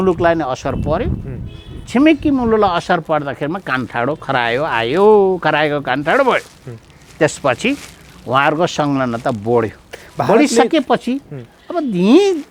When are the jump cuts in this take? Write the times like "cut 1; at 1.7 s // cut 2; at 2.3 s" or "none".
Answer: none

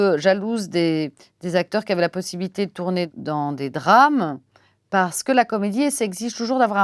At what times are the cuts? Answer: cut 1; at 3.1 s

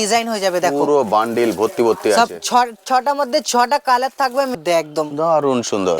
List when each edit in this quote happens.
cut 1; at 4.6 s

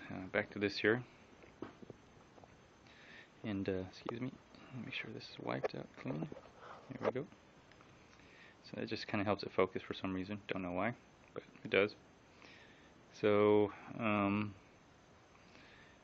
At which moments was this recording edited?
cut 1; at 3.6 s

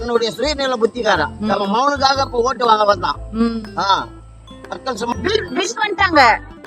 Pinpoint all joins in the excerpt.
cut 1; at 5.1 s

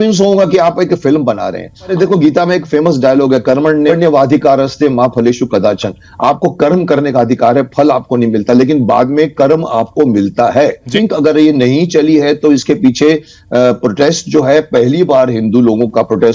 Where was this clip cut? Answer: cut 1; at 1.9 s // cut 2; at 3.9 s // cut 3; at 10.9 s

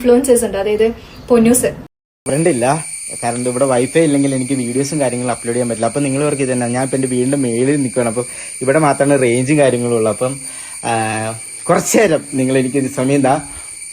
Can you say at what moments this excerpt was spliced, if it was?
cut 1; at 1.8 s

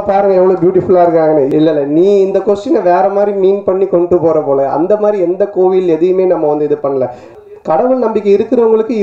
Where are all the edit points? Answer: cut 1; at 1.5 s // cut 2; at 7.3 s

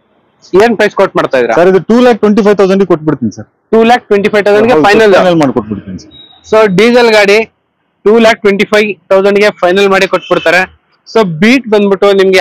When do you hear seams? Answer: none

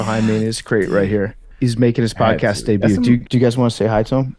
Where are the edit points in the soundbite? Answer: cut 1; at 1.4 s // cut 2; at 3.2 s

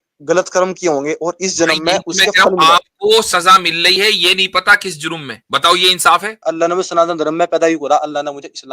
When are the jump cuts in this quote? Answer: cut 1; at 5.3 s // cut 2; at 6.5 s

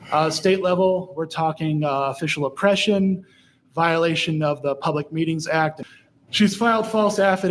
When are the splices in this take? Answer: cut 1; at 5.8 s

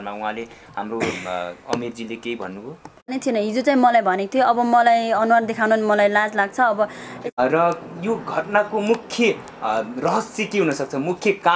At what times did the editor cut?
cut 1; at 3.2 s // cut 2; at 7.1 s

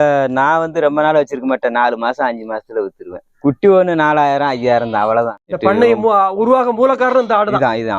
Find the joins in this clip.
cut 1; at 5.4 s

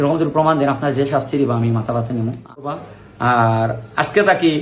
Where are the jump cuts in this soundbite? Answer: cut 1; at 2.6 s

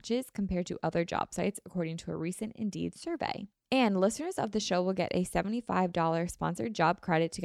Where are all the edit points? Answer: cut 1; at 3.5 s

